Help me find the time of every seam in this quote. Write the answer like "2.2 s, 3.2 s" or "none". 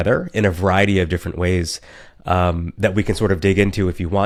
none